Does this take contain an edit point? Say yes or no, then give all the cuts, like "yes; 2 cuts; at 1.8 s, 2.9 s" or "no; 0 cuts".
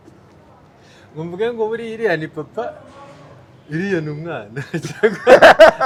no; 0 cuts